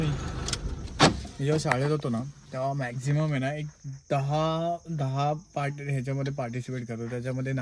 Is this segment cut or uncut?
uncut